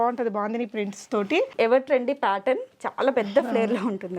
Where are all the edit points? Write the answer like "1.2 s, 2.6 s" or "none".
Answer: 1.5 s